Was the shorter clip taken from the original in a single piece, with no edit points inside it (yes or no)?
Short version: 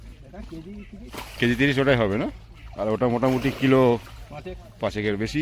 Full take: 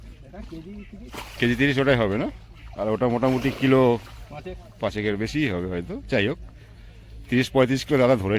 yes